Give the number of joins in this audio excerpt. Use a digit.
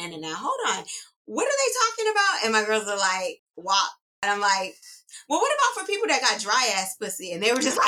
2